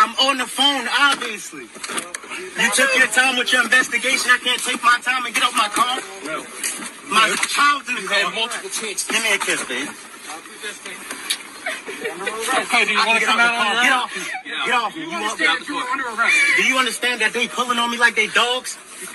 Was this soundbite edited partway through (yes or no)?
yes